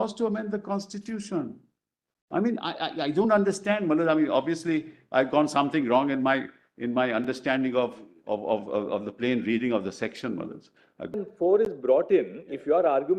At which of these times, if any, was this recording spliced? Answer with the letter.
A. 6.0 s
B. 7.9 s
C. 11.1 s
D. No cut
C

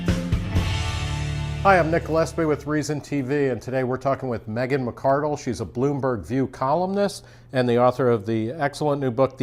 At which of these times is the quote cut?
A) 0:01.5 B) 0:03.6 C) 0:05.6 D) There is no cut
A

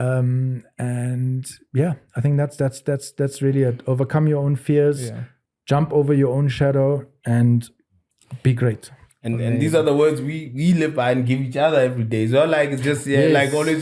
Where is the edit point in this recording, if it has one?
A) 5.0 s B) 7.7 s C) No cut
C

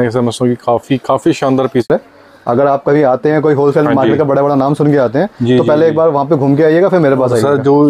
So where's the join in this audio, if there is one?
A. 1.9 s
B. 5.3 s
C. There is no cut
A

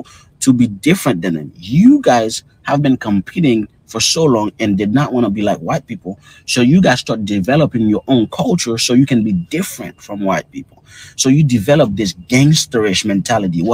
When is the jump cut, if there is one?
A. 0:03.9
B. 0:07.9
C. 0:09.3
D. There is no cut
C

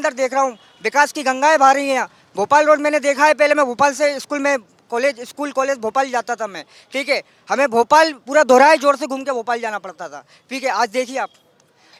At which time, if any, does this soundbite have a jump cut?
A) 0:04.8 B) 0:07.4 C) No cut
C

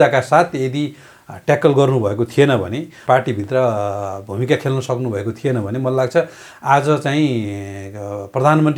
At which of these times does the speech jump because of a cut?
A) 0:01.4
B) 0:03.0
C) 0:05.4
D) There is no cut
B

